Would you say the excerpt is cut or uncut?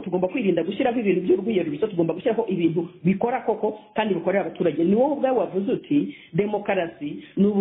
uncut